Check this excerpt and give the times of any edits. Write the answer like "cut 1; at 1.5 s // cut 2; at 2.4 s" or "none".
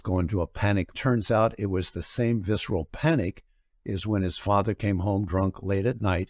cut 1; at 0.9 s